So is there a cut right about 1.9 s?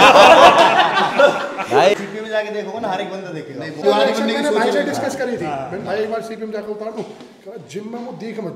yes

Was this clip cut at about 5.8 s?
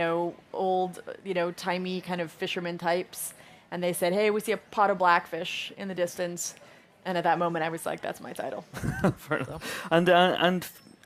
no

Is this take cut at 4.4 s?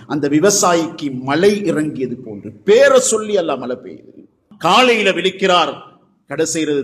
yes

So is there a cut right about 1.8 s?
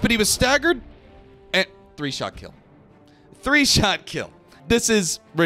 no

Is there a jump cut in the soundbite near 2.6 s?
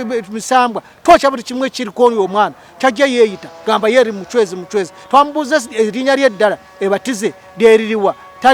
no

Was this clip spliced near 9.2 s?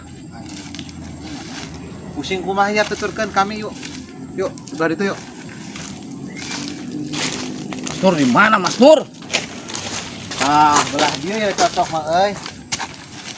yes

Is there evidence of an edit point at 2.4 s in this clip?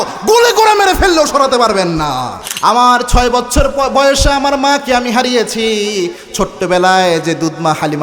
yes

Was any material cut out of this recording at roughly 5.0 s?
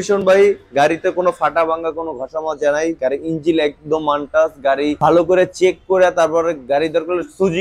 yes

